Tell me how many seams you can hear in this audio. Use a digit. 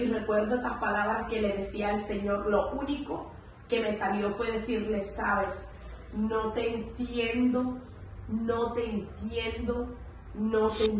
0